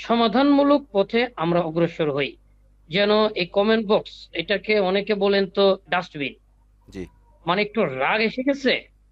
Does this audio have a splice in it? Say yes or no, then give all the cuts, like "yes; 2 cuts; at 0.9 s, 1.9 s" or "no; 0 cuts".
no; 0 cuts